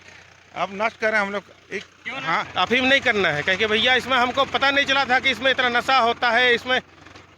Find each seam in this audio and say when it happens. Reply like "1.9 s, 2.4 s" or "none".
2.5 s